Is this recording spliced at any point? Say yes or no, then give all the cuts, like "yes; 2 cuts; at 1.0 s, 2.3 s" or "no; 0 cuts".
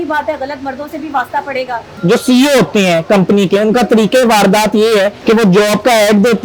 yes; 2 cuts; at 2.0 s, 5.2 s